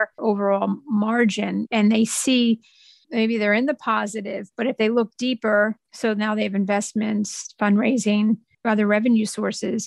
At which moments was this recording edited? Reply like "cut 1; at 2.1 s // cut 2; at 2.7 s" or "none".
cut 1; at 3.0 s // cut 2; at 5.8 s